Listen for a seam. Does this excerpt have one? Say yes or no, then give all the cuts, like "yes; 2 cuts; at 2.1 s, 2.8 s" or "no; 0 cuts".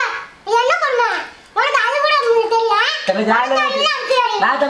no; 0 cuts